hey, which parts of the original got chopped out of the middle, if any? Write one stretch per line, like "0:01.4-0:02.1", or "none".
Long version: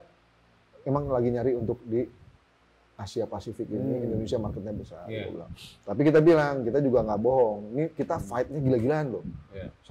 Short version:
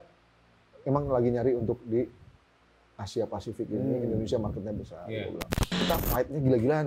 0:05.8-0:08.0